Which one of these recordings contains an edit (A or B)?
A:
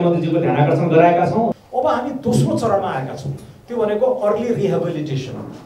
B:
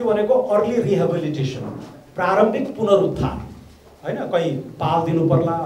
A